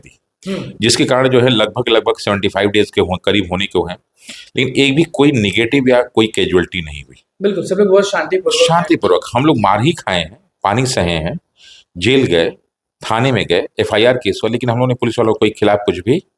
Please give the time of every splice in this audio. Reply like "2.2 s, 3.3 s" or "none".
none